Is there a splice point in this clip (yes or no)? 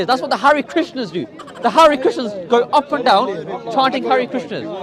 no